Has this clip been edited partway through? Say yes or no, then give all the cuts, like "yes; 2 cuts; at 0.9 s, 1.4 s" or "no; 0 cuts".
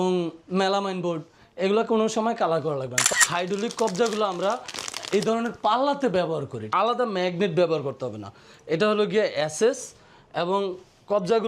yes; 2 cuts; at 3.0 s, 6.6 s